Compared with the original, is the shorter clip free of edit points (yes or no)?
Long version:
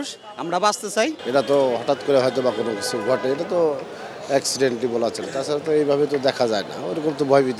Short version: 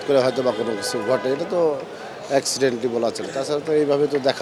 yes